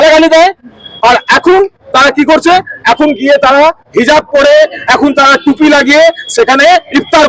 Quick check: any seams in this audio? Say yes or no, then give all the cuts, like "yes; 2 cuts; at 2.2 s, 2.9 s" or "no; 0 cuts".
no; 0 cuts